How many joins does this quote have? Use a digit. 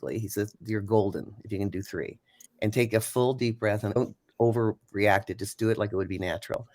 1